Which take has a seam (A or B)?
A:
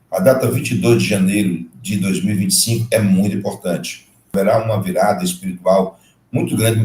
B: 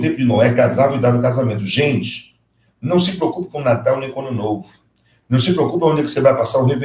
A